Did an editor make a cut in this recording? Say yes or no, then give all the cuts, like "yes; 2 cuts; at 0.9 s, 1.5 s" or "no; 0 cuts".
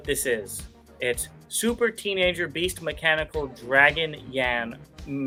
no; 0 cuts